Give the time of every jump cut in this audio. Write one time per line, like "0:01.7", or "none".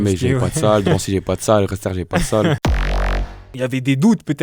0:03.0